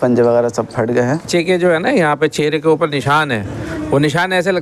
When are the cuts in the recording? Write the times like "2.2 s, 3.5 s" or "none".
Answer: 1.3 s